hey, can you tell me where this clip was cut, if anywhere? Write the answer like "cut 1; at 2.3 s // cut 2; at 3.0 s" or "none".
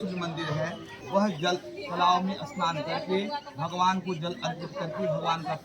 cut 1; at 0.9 s